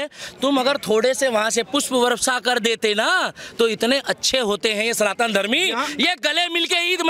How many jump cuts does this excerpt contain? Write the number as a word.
zero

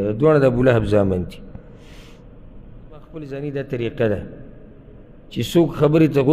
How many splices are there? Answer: one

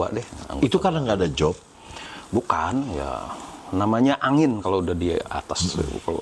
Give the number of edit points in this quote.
zero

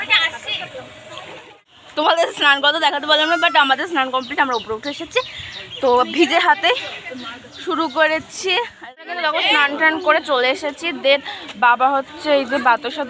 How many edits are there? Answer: two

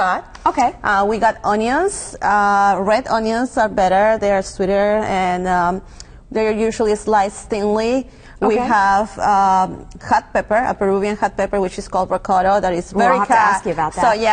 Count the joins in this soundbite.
one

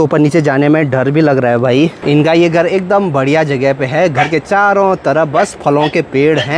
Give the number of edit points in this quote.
one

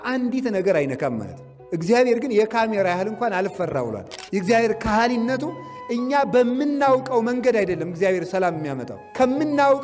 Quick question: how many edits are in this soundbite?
one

